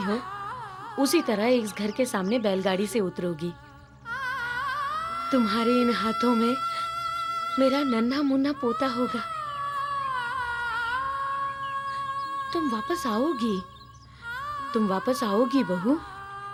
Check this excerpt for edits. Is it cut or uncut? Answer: uncut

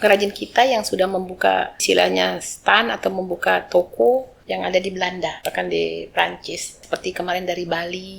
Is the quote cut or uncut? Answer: cut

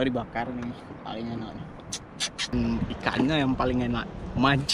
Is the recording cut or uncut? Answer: cut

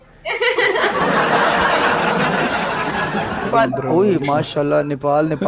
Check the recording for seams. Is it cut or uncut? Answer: cut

